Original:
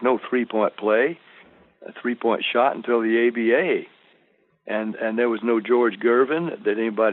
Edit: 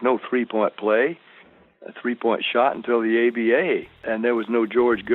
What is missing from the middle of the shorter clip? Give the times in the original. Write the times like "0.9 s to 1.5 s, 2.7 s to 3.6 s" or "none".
4.0 s to 4.9 s